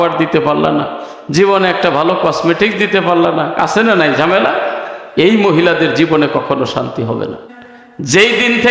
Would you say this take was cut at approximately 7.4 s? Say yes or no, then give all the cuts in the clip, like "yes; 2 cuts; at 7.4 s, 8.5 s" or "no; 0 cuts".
yes; 1 cut; at 7.4 s